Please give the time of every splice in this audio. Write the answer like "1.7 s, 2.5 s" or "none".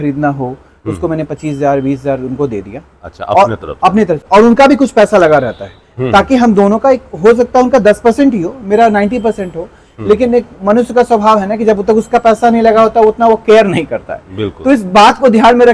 none